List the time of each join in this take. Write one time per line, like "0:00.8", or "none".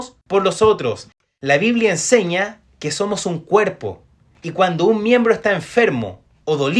0:01.1